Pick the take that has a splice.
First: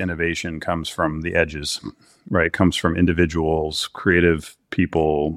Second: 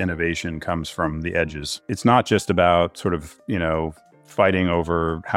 second; 1 cut; at 1.8 s

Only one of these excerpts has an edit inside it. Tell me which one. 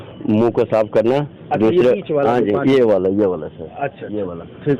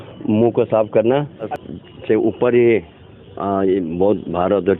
second; 1 cut; at 1.5 s

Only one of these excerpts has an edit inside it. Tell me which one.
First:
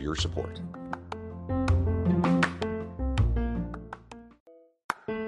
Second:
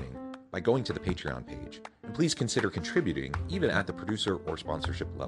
first; 1 cut; at 4.3 s

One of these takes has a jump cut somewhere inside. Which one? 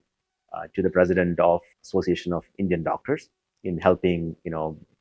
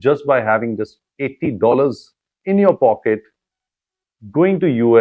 first; 1 cut; at 1.7 s

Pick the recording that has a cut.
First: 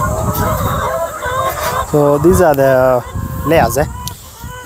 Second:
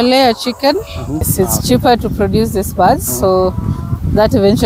second; 1 cut; at 1.3 s

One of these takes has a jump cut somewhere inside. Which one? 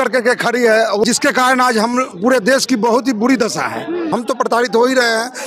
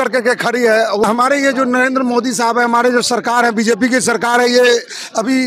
first; 2 cuts; at 1.0 s, 4.1 s

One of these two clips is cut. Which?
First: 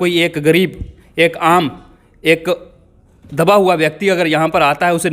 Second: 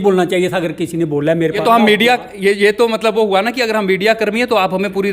second; 1 cut; at 1.6 s

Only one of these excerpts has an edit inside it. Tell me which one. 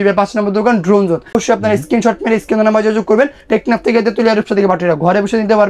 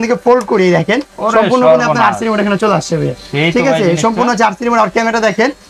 first; 1 cut; at 1.3 s

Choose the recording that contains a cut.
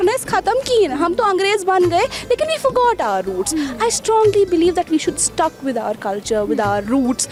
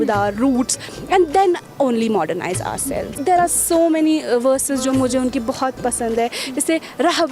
second; 1 cut; at 3.1 s

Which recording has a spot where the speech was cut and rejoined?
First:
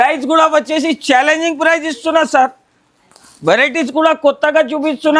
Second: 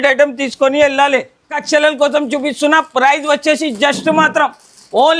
second; 1 cut; at 1.6 s

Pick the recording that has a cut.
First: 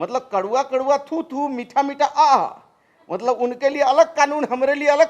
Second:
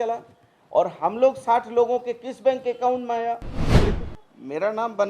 second; 1 cut; at 3.7 s

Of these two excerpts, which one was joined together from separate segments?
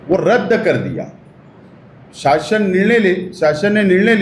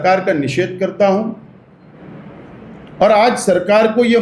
second; 1 cut; at 1.8 s

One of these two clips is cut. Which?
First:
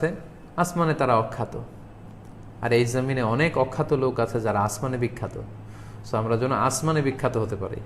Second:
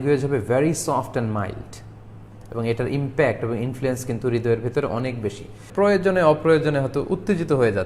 second; 1 cut; at 5.6 s

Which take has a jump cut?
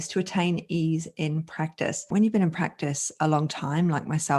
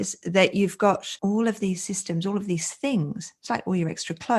first; 1 cut; at 2.0 s

